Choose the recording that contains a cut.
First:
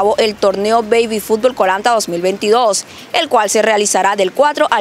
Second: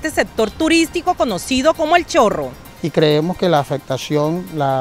second; 1 cut; at 2.6 s

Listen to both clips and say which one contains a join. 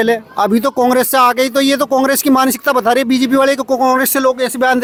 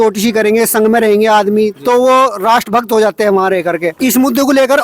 second; 1 cut; at 3.9 s

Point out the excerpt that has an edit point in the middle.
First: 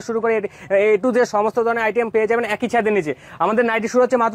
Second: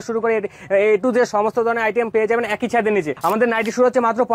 second; 1 cut; at 3.1 s

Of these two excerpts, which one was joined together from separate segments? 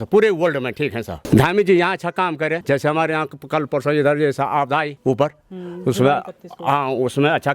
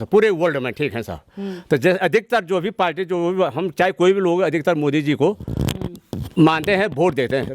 first; 3 cuts; at 1.1 s, 2.6 s, 4.9 s

